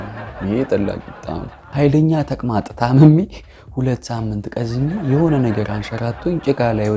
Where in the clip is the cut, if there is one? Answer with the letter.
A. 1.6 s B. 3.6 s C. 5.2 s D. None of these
A